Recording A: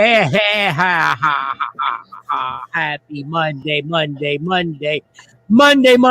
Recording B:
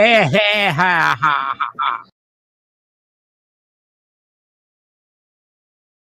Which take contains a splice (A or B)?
A